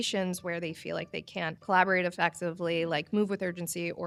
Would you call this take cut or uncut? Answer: uncut